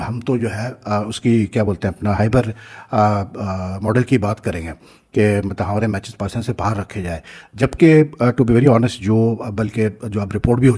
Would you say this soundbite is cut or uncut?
uncut